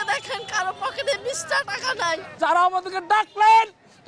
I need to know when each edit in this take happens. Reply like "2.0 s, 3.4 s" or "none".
2.3 s